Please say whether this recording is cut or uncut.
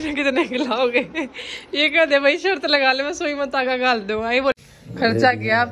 cut